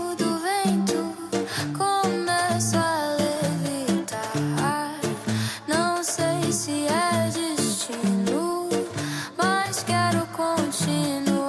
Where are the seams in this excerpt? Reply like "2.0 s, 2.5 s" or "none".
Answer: none